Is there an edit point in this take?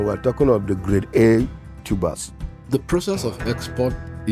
yes; 1 cut; at 2.7 s

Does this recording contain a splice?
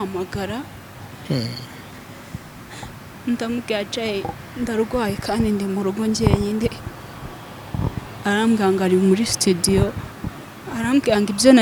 no; 0 cuts

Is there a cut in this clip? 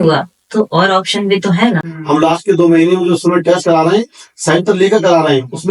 yes; 1 cut; at 1.9 s

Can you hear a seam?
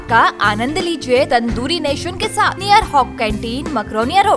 yes; 2 cuts; at 1.3 s, 2.6 s

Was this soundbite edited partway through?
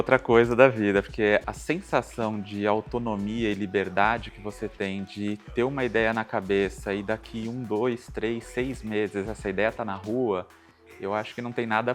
yes; 1 cut; at 1.4 s

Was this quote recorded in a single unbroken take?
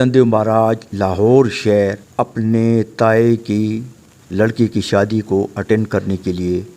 no; 1 cut; at 2.0 s

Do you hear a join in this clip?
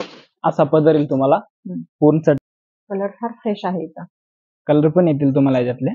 yes; 1 cut; at 2.4 s

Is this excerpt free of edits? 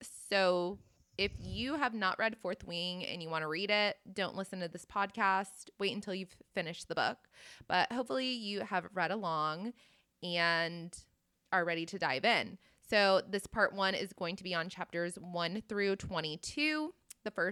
yes; 0 cuts

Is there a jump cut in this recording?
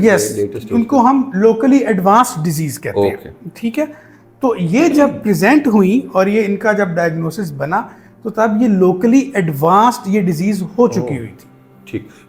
no; 0 cuts

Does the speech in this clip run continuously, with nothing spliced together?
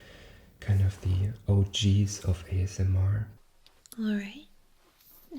no; 1 cut; at 3.3 s

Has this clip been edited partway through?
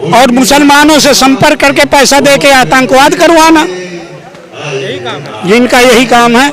no; 0 cuts

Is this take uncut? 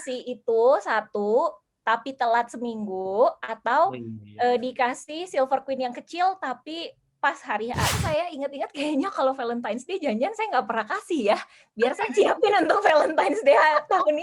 no; 1 cut; at 8.0 s

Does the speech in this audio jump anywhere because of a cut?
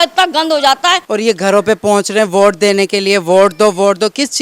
yes; 1 cut; at 1.0 s

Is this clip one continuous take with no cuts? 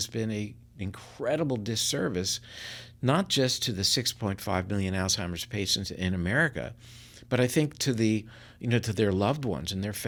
yes; 0 cuts

